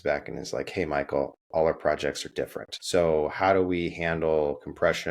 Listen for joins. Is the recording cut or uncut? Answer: cut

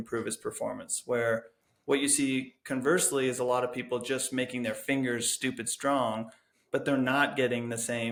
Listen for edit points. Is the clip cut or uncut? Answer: uncut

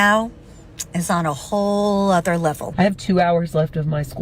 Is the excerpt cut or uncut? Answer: cut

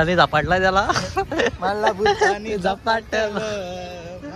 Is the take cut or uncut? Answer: uncut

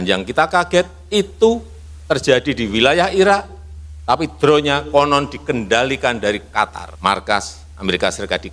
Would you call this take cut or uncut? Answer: cut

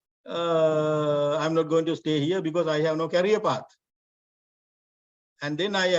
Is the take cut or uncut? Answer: uncut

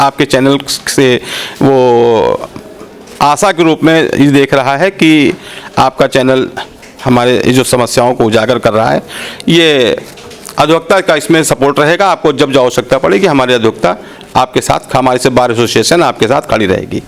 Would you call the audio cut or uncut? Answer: uncut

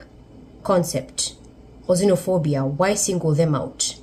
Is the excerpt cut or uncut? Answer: uncut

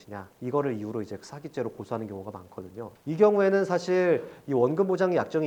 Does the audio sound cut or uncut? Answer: uncut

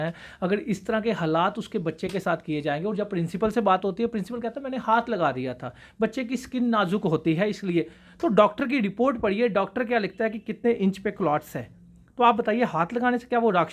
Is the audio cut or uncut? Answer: uncut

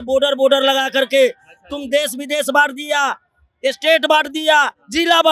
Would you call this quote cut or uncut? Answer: uncut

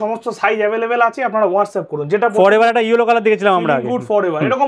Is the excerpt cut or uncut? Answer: uncut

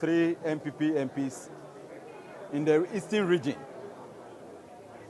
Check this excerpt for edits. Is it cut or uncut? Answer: uncut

